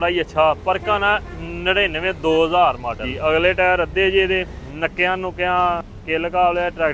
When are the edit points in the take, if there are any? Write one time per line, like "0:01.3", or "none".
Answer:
0:03.1
0:04.6
0:05.9